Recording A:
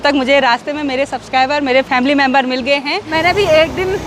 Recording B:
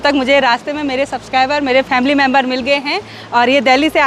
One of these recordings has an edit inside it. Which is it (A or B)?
A